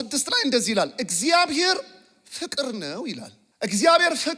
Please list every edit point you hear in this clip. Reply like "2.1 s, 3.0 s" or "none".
3.4 s